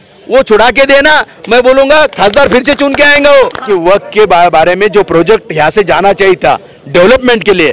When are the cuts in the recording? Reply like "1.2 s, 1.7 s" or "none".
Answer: 3.7 s